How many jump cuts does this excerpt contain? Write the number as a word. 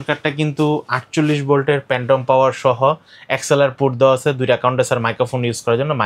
zero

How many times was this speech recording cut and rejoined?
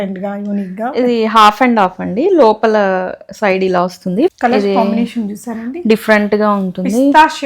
one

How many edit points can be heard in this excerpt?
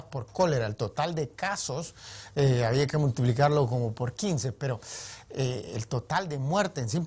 one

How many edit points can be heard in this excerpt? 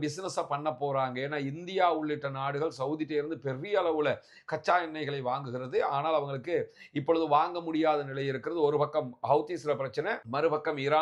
zero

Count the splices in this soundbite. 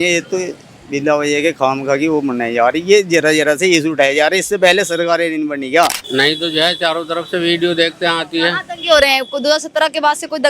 one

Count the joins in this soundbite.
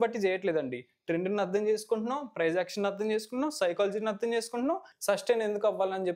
one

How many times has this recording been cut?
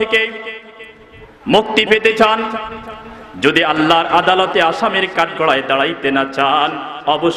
zero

